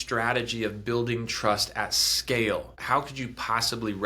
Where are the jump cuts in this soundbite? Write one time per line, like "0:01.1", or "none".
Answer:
0:02.8